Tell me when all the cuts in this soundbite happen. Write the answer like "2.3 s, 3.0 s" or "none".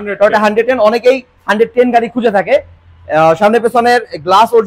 none